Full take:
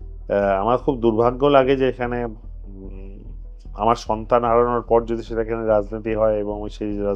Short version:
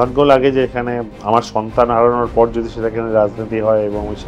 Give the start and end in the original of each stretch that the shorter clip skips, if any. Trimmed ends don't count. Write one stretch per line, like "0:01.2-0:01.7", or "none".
0:02.4-0:03.6